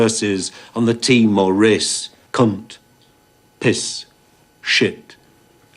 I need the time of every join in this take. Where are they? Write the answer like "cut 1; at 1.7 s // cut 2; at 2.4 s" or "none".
cut 1; at 2.2 s

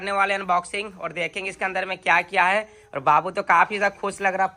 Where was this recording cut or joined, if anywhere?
none

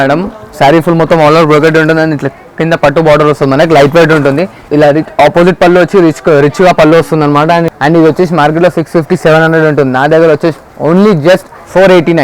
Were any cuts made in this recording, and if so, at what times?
cut 1; at 4.6 s // cut 2; at 7.7 s

